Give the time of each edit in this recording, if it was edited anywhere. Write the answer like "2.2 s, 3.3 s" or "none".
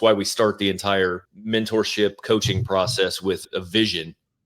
1.3 s, 3.4 s